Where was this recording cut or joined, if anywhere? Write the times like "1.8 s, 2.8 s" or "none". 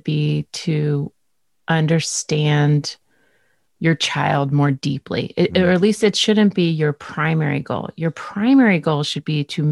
none